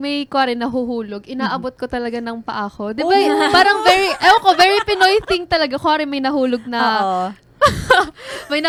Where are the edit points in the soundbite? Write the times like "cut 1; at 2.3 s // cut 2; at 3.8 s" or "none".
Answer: none

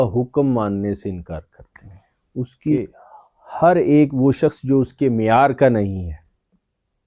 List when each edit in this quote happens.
cut 1; at 2.8 s

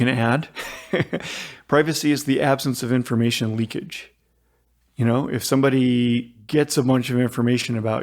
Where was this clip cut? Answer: cut 1; at 6.4 s

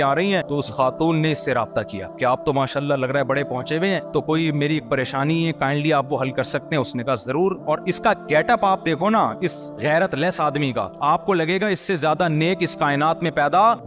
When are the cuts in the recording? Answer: none

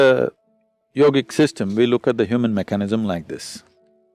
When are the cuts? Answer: none

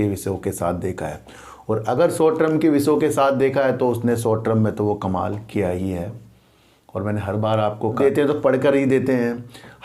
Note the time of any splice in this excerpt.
cut 1; at 8.0 s

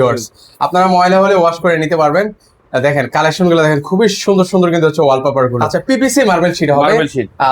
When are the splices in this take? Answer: cut 1; at 5.8 s

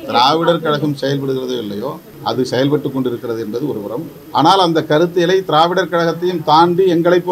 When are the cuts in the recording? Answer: cut 1; at 2.1 s // cut 2; at 4.2 s

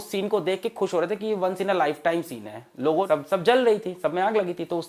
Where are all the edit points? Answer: cut 1; at 3.1 s

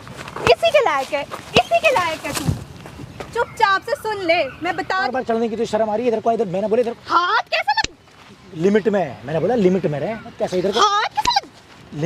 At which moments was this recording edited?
cut 1; at 4.9 s

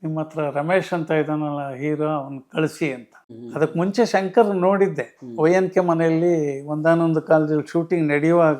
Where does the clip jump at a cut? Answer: cut 1; at 3.4 s

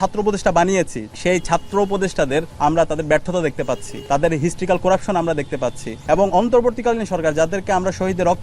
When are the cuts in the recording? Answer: cut 1; at 1.0 s // cut 2; at 2.5 s // cut 3; at 3.9 s // cut 4; at 5.9 s

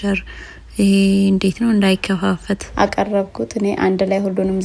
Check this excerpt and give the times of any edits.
cut 1; at 2.7 s

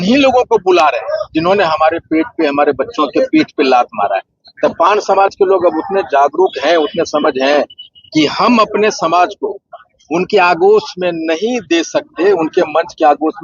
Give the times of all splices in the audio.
none

